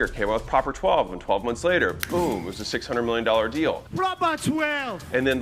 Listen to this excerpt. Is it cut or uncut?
uncut